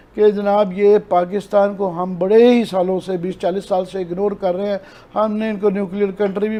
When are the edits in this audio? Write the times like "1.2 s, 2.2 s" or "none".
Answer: none